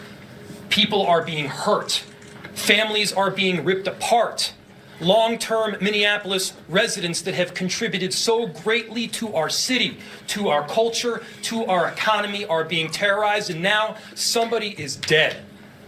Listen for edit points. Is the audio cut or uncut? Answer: uncut